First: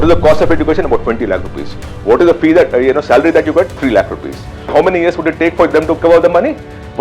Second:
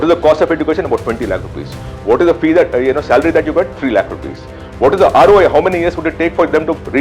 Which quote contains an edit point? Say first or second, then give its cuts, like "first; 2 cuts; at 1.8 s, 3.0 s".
first; 2 cuts; at 4.7 s, 6.0 s